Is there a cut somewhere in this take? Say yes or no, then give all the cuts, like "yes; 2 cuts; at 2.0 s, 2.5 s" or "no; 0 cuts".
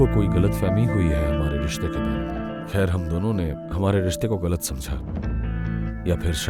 yes; 1 cut; at 2.4 s